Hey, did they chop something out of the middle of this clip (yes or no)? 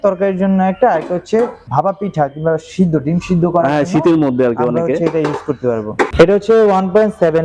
yes